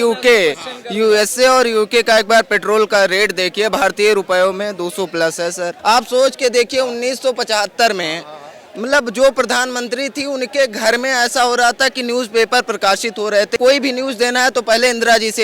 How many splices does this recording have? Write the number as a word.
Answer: two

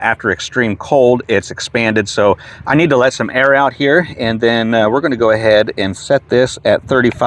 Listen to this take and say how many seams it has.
zero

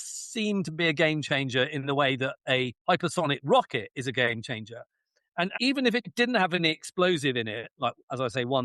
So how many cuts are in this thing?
two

